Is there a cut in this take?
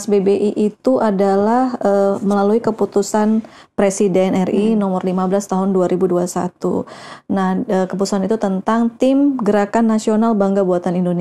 no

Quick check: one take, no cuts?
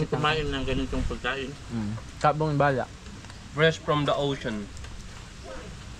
yes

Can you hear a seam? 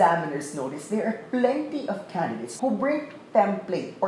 yes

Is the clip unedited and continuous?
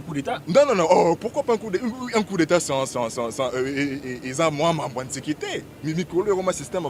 yes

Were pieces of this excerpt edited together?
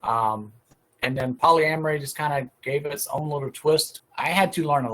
yes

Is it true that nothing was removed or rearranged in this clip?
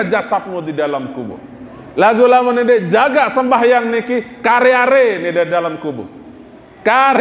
yes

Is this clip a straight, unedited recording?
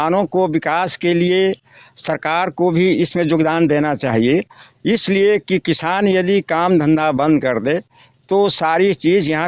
yes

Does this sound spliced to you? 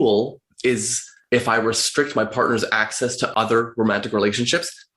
yes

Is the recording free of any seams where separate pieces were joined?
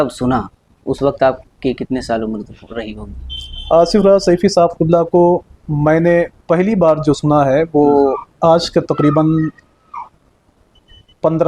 yes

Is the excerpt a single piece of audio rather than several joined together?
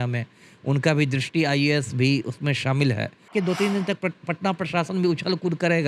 no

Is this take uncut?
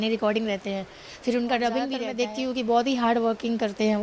no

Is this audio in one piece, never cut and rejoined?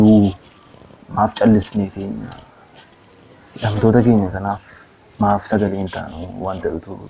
yes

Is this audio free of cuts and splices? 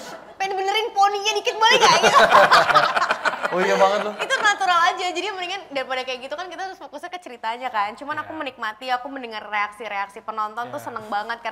yes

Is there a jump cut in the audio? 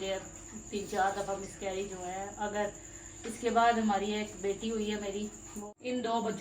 yes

